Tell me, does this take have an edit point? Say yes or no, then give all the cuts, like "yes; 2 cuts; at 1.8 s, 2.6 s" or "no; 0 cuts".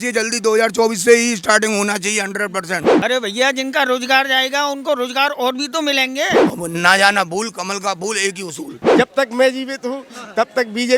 yes; 3 cuts; at 2.9 s, 6.5 s, 8.8 s